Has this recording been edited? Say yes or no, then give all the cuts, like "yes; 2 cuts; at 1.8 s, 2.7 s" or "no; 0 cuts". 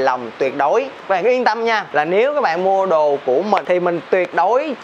yes; 3 cuts; at 1.0 s, 1.9 s, 3.6 s